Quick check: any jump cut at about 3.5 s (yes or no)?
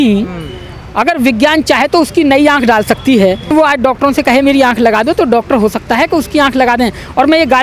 yes